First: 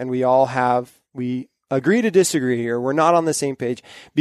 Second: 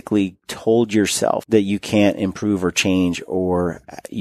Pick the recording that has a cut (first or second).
second